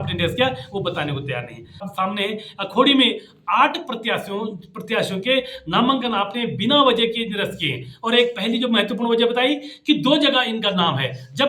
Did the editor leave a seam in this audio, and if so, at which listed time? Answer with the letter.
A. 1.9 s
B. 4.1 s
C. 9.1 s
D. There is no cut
A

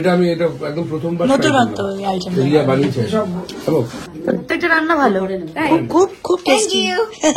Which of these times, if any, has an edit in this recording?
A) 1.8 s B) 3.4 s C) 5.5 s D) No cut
D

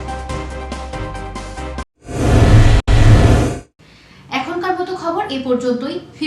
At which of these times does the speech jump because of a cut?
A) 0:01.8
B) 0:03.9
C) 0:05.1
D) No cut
D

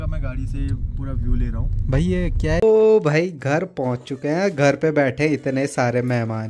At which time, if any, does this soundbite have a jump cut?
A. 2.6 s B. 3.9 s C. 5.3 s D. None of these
A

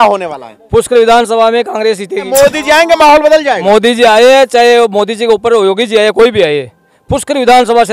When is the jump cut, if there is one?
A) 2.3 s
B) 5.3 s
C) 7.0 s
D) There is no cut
A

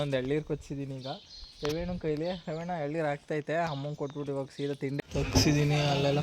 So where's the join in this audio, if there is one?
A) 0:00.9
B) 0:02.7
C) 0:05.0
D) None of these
C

